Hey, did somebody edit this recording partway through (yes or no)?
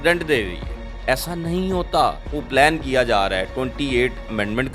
yes